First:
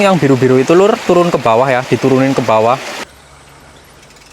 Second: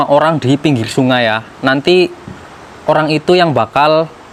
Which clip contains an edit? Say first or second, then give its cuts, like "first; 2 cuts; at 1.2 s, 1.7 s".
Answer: first; 1 cut; at 3.0 s